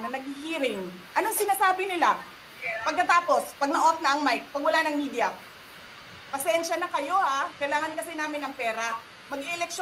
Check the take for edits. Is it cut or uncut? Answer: cut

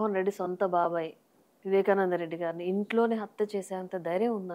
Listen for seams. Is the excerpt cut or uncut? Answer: uncut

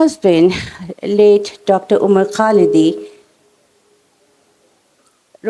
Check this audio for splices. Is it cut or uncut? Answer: uncut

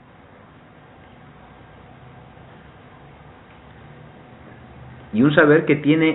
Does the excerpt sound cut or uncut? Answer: cut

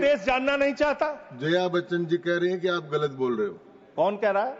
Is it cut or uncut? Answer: uncut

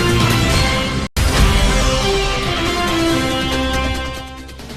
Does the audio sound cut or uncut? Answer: cut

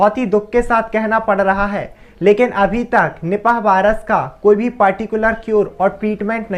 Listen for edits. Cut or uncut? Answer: uncut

